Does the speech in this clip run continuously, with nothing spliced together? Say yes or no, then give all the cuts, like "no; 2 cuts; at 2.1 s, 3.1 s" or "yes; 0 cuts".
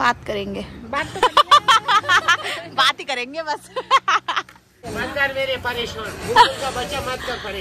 no; 1 cut; at 4.9 s